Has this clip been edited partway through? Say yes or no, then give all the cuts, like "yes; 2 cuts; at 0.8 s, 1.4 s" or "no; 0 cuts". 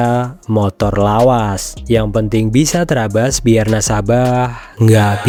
no; 0 cuts